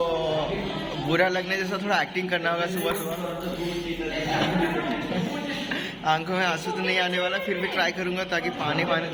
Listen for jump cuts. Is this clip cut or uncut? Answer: uncut